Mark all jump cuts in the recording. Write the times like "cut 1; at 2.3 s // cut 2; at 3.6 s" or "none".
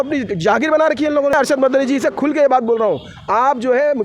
cut 1; at 1.3 s